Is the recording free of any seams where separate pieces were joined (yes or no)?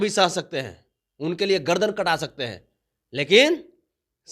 yes